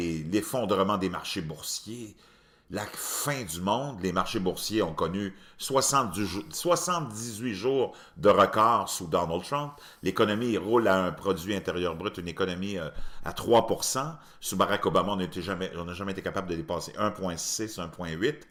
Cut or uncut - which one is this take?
uncut